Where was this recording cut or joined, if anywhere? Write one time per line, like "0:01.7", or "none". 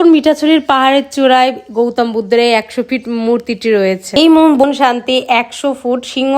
0:04.6